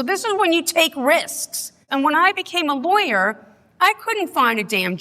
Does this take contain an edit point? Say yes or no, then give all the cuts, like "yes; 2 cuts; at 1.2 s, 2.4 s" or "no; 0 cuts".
yes; 1 cut; at 1.8 s